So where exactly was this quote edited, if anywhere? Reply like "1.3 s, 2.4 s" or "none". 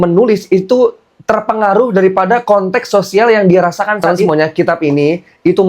4.2 s